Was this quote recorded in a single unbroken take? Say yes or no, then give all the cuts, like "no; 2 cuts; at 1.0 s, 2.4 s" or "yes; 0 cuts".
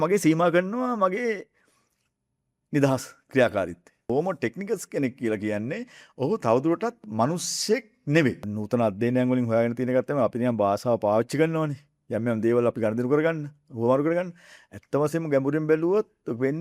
no; 2 cuts; at 4.1 s, 8.5 s